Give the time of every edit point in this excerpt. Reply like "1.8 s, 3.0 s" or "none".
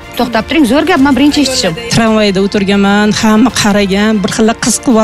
1.4 s